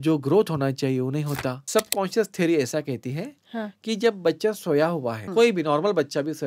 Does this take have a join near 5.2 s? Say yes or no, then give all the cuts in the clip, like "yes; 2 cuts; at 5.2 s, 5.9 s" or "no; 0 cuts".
yes; 2 cuts; at 1.5 s, 5.2 s